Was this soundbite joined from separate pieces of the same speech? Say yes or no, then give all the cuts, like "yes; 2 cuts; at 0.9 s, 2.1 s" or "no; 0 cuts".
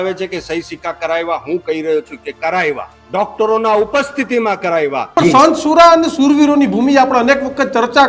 yes; 2 cuts; at 2.9 s, 5.1 s